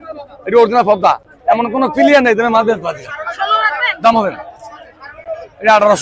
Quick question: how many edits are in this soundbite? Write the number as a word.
zero